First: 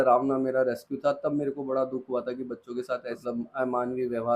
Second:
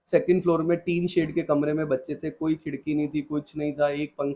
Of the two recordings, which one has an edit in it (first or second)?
first